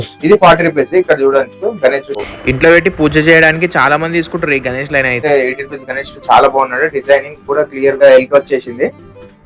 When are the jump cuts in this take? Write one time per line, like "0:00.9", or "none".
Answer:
0:02.2
0:05.2
0:08.0